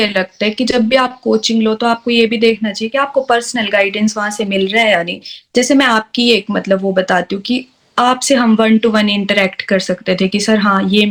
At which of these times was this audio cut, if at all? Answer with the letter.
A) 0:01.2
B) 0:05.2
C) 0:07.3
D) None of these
D